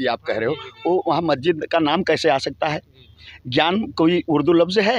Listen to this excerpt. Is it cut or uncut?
uncut